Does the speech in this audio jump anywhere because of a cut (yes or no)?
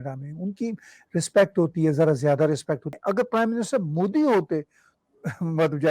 yes